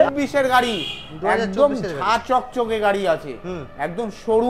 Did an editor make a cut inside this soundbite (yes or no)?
no